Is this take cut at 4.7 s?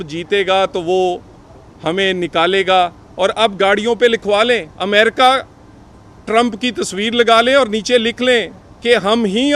yes; 1 cut; at 4.7 s

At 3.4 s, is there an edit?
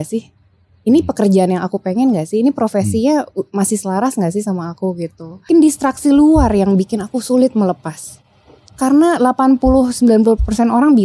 no; 1 cut; at 5.5 s

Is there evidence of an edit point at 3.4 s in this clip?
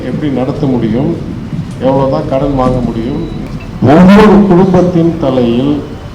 yes; 1 cut; at 3.4 s

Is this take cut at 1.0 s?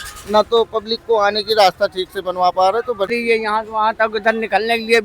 no; 1 cut; at 3.1 s

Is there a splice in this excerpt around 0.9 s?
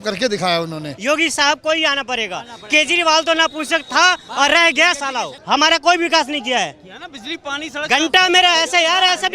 yes; 2 cuts; at 0.9 s, 5.3 s

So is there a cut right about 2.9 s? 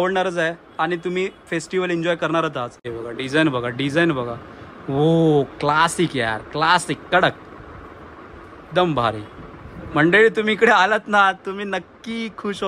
yes; 1 cut; at 2.9 s

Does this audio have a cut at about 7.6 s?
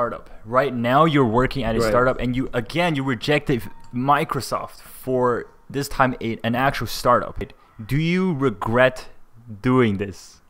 yes; 1 cut; at 7.6 s

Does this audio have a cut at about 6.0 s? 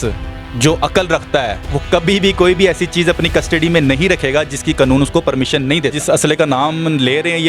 yes; 1 cut; at 6.0 s

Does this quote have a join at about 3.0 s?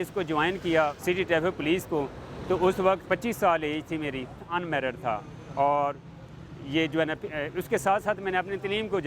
yes; 3 cuts; at 1.0 s, 3.0 s, 4.4 s

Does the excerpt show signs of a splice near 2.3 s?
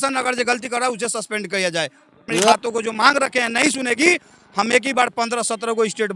yes; 1 cut; at 2.3 s

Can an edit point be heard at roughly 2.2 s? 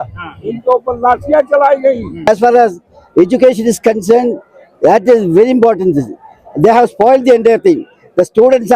yes; 1 cut; at 2.2 s

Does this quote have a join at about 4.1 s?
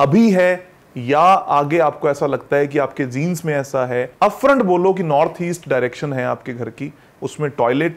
yes; 1 cut; at 4.1 s

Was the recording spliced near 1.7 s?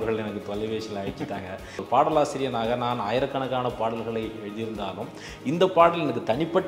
yes; 1 cut; at 1.7 s

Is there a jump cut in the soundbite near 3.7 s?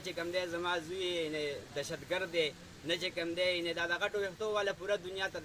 no; 0 cuts

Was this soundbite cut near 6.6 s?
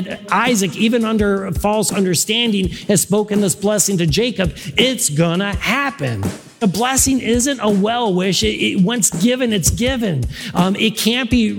yes; 1 cut; at 6.6 s

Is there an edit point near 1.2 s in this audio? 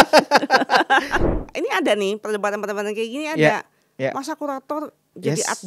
yes; 1 cut; at 1.2 s

